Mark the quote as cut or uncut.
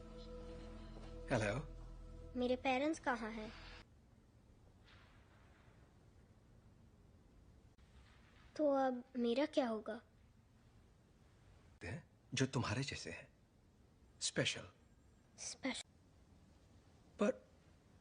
cut